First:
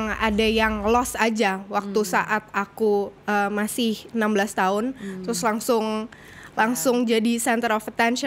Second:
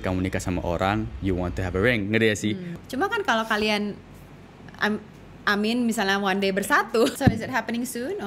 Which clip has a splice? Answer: second; 2 cuts; at 2.8 s, 7.1 s

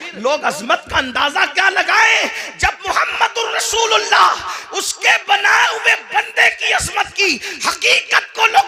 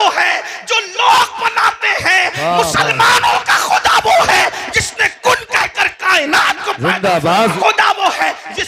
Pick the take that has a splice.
second; 1 cut; at 7.5 s

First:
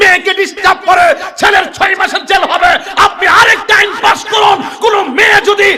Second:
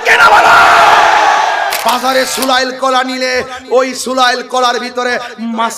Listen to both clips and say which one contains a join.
second; 1 cut; at 1.8 s

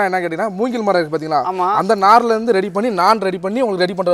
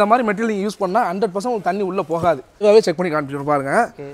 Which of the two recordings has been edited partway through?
second; 1 cut; at 2.6 s

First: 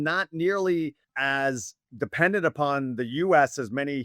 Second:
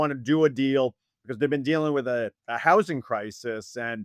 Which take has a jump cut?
first; 1 cut; at 1.1 s

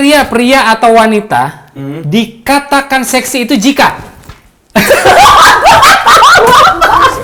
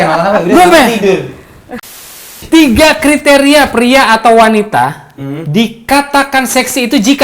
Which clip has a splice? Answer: second; 1 cut; at 2.1 s

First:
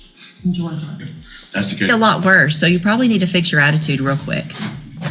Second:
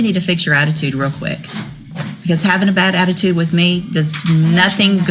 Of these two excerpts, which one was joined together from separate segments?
first; 1 cut; at 1.9 s

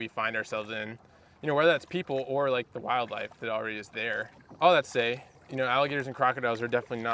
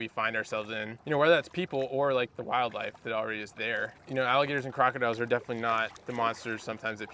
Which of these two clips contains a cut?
second; 3 cuts; at 0.9 s, 3.9 s, 6.0 s

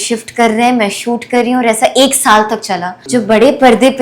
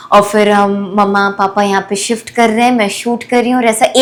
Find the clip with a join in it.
first; 1 cut; at 2.9 s

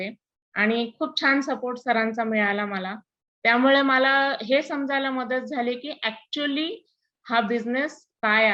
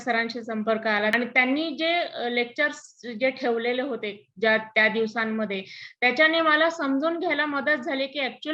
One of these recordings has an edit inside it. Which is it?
second; 1 cut; at 1.1 s

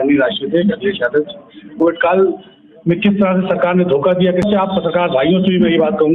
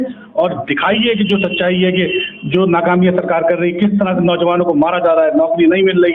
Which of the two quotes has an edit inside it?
first; 2 cuts; at 1.8 s, 4.4 s

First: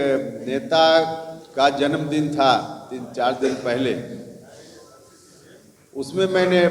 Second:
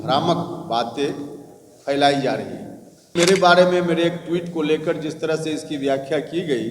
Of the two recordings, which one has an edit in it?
second; 1 cut; at 3.1 s

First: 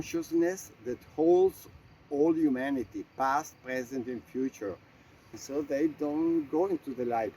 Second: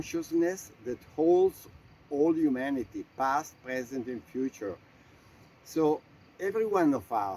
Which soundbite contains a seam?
first; 1 cut; at 5.3 s

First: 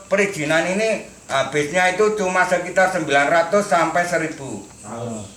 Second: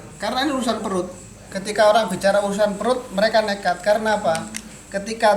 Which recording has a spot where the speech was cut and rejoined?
second; 1 cut; at 1.7 s

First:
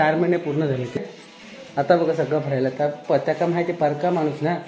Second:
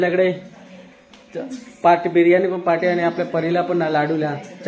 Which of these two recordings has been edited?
first; 1 cut; at 1.0 s

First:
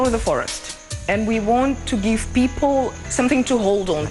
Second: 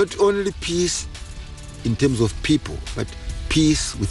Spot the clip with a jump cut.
first; 1 cut; at 3.0 s

